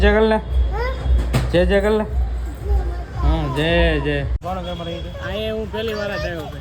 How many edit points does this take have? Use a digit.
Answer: 1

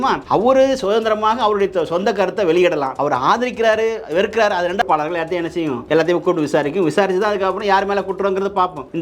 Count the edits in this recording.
1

